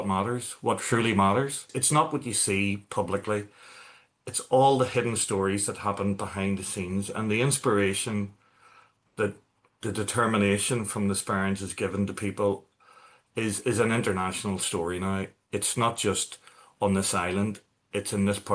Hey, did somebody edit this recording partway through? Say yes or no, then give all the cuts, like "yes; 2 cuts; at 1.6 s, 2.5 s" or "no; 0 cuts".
yes; 1 cut; at 1.7 s